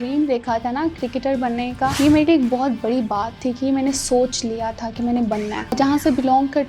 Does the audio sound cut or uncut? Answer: cut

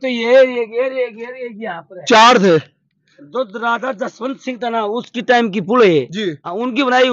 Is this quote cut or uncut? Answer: uncut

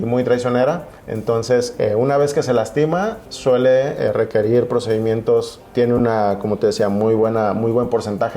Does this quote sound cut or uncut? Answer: cut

